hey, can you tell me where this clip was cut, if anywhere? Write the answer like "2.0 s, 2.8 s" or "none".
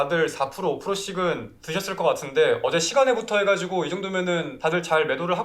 1.5 s, 4.5 s